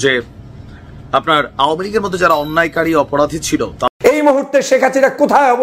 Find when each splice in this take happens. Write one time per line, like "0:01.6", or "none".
0:03.9